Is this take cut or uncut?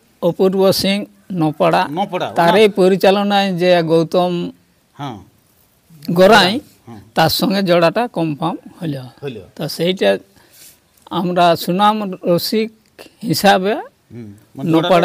uncut